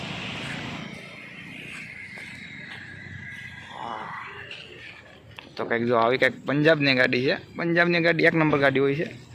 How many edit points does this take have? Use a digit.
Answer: 0